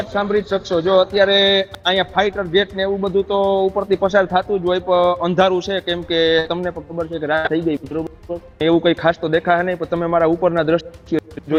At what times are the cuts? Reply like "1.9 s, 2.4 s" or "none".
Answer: none